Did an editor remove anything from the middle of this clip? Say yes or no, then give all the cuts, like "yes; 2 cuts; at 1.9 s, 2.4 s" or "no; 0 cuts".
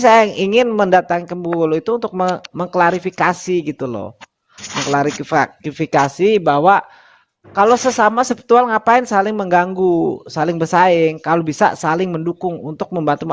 no; 0 cuts